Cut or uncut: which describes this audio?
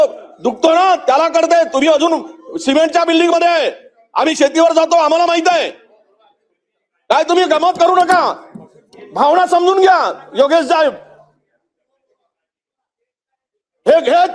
uncut